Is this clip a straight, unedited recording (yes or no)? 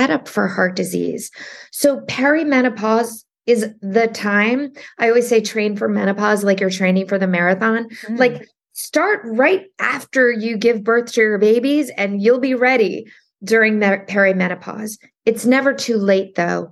yes